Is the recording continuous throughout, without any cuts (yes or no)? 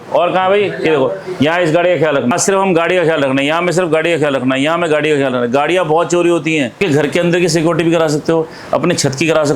no